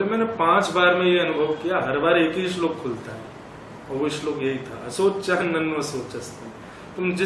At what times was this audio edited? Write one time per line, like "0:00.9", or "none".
none